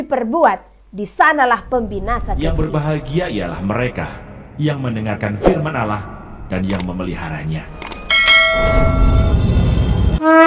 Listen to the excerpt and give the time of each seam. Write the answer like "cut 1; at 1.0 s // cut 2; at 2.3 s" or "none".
cut 1; at 2.3 s